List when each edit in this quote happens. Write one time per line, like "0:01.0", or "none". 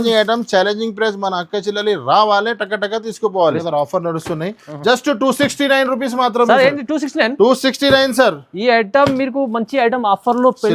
0:03.5